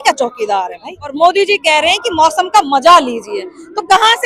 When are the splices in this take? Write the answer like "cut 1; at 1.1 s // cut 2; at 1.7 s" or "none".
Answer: cut 1; at 1.1 s